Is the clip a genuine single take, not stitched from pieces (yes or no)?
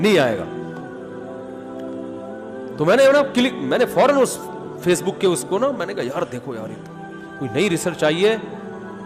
no